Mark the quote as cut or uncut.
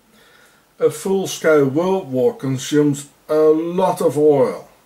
uncut